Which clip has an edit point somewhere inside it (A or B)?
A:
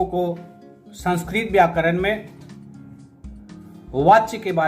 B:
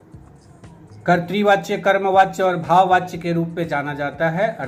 A